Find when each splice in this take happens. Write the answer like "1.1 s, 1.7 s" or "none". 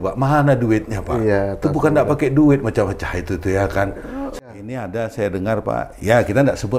4.4 s